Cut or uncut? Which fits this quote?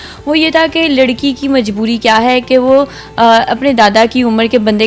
uncut